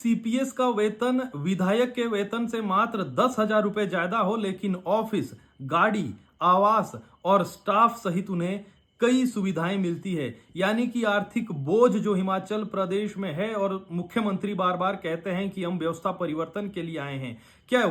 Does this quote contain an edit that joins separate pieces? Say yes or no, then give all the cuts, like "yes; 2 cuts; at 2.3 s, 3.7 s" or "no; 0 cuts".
no; 0 cuts